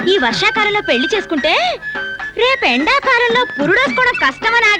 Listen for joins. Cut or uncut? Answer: uncut